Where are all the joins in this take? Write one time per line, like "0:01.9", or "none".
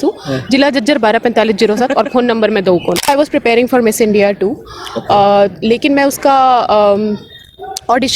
0:03.1